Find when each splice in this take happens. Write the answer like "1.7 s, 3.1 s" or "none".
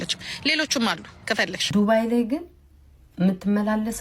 1.7 s